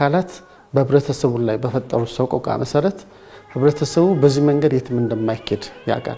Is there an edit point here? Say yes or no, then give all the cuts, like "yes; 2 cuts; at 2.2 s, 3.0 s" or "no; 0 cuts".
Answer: no; 0 cuts